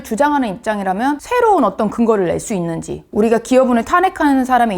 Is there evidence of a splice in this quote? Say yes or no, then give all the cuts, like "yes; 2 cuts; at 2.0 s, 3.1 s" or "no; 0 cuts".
yes; 2 cuts; at 1.2 s, 3.0 s